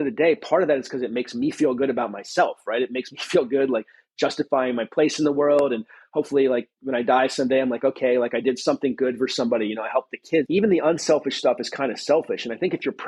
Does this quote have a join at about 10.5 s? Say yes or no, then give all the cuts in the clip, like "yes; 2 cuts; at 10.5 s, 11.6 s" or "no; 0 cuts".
yes; 1 cut; at 10.5 s